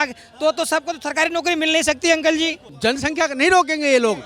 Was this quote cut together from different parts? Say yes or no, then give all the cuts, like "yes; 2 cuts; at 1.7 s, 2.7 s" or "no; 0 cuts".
yes; 1 cut; at 2.6 s